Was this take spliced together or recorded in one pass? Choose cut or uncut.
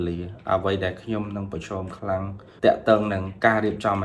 cut